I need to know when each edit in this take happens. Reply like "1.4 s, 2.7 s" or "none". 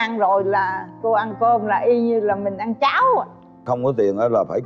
3.6 s